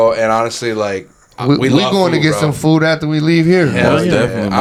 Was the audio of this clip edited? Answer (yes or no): no